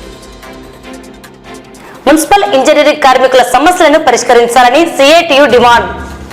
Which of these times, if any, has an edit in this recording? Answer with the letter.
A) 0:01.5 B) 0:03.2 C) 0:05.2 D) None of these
A